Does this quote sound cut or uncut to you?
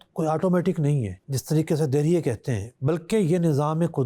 cut